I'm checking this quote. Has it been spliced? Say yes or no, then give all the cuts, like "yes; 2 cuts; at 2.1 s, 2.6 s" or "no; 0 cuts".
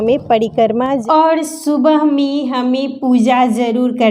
yes; 1 cut; at 1.0 s